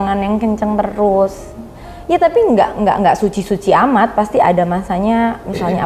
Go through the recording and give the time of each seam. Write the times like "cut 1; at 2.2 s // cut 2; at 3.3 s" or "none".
none